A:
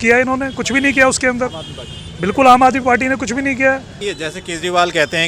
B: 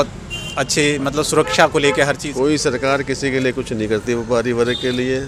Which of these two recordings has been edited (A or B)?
A